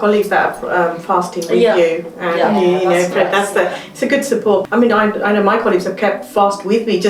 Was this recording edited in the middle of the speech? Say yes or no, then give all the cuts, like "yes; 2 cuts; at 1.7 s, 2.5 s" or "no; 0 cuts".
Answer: yes; 1 cut; at 4.6 s